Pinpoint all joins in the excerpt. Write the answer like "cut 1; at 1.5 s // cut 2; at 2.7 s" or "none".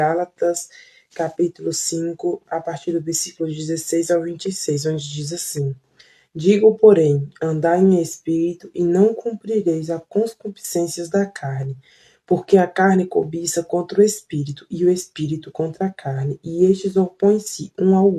none